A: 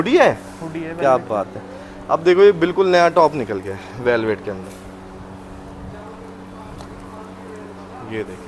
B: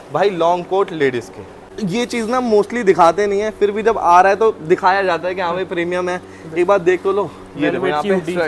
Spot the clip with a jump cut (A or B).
B